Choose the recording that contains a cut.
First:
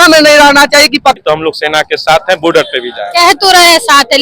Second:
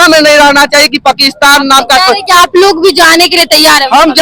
first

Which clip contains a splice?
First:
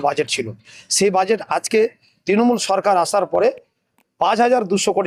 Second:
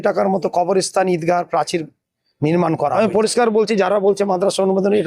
second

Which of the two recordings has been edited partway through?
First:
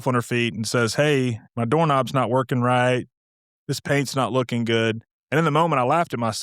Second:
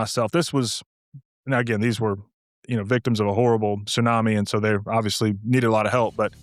first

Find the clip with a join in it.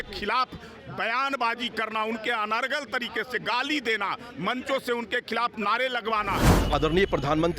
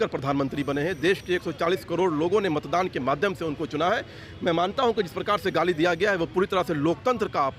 first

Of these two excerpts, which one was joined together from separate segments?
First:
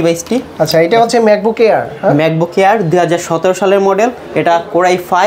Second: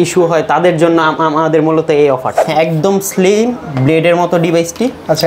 second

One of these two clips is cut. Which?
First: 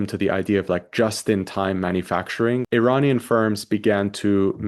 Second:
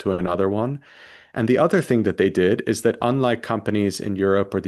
first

